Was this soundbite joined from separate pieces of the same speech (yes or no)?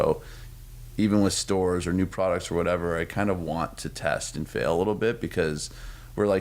no